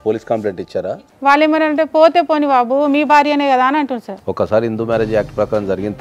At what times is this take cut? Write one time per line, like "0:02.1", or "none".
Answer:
0:00.9
0:04.1

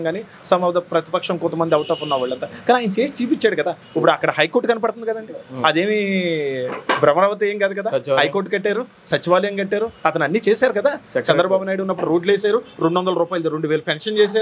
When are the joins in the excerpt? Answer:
none

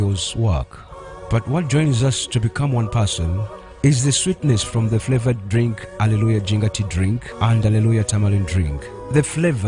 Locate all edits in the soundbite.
none

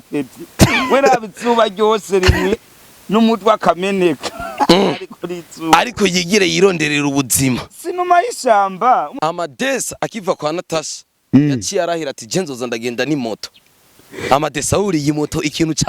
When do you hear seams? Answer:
0:09.1

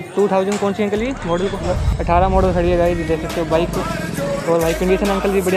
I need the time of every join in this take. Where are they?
0:01.8

